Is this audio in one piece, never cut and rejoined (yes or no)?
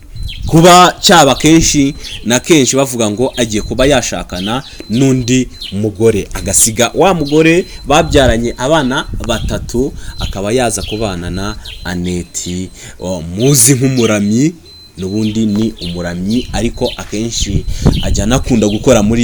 yes